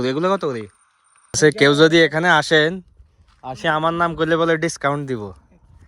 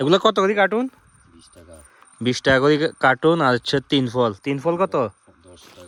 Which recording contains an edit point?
first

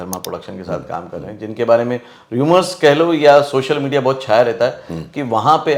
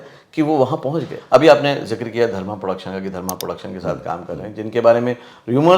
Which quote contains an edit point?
second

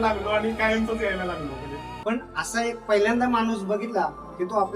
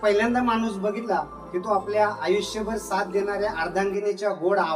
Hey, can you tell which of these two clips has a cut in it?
first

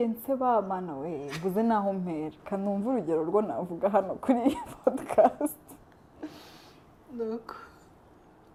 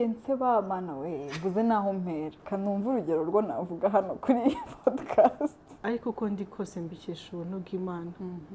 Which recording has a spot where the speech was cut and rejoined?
second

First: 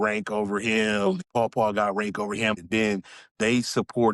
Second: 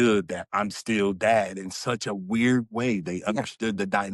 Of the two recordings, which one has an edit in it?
first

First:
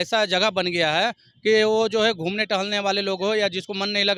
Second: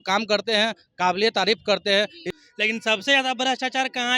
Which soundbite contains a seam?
second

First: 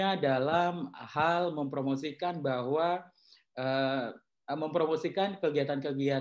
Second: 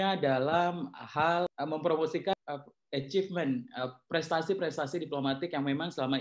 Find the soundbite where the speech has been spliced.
second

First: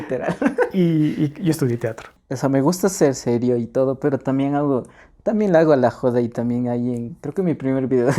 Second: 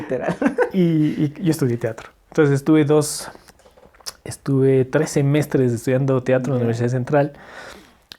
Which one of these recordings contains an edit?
first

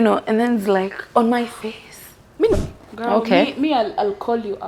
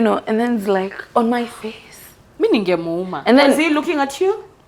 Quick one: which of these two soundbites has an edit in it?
first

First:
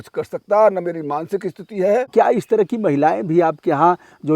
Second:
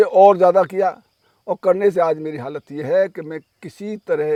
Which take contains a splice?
first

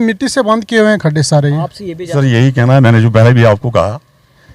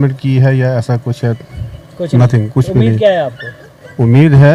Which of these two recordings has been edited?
first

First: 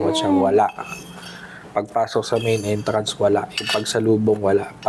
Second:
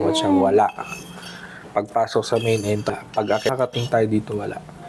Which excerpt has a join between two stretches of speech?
second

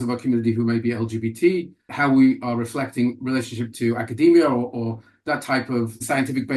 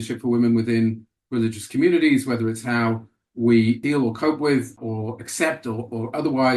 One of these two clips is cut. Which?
second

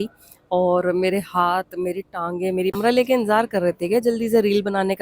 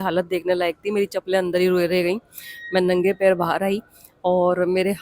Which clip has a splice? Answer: first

